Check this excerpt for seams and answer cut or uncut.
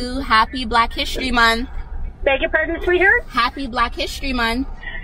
uncut